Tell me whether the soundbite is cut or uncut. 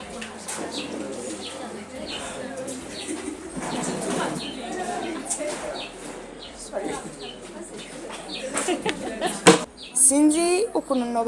cut